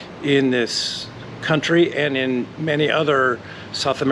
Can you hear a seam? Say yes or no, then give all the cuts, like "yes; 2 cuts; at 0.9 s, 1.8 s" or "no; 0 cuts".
no; 0 cuts